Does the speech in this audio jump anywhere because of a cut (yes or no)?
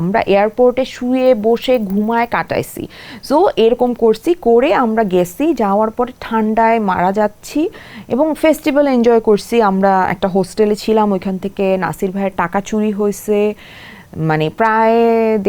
no